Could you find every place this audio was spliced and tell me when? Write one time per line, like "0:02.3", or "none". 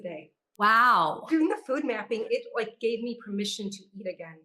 0:01.2
0:02.2